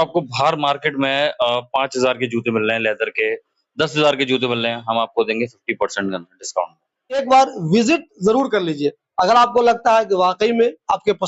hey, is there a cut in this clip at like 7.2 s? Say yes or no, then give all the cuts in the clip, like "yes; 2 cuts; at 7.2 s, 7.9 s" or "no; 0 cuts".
yes; 1 cut; at 7.2 s